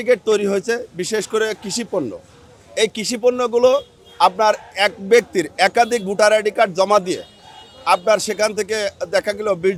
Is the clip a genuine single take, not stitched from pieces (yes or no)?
yes